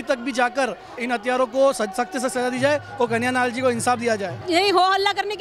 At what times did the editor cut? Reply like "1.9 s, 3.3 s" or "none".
1.0 s, 4.3 s

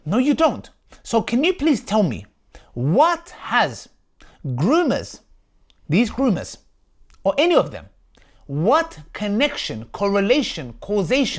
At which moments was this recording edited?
none

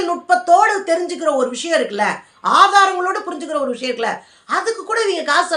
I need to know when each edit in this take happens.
none

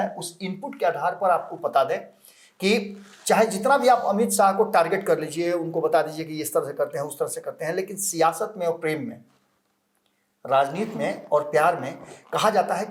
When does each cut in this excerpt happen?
none

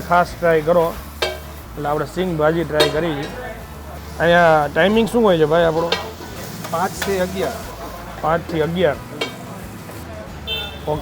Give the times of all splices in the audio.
none

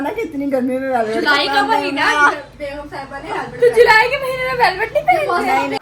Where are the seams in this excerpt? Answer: none

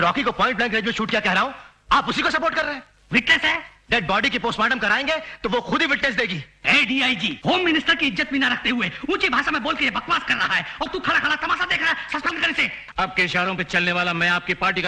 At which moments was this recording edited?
12.9 s

